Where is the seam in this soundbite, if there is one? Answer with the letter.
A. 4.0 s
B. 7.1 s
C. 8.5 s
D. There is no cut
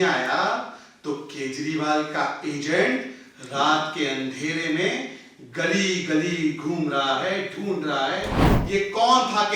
C